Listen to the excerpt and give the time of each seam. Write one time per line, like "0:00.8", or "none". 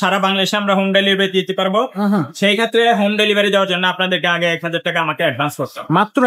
none